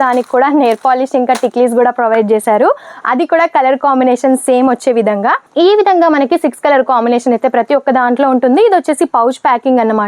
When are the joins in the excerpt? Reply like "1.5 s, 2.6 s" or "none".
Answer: none